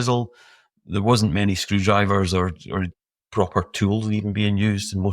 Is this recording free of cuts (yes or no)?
yes